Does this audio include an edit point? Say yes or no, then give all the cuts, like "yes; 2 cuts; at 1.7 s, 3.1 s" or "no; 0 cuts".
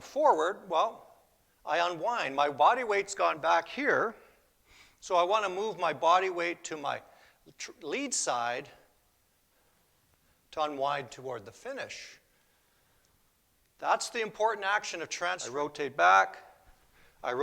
yes; 1 cut; at 15.4 s